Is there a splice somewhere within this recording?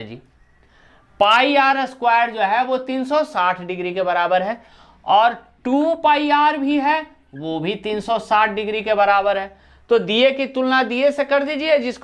no; 0 cuts

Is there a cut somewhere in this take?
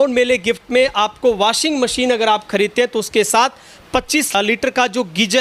yes; 1 cut; at 4.3 s

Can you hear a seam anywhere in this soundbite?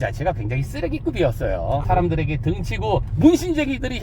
yes; 2 cuts; at 1.8 s, 3.1 s

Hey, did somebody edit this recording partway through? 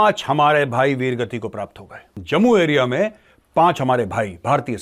no; 0 cuts

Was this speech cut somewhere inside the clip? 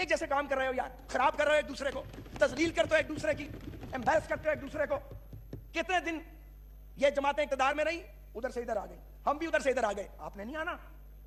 no; 0 cuts

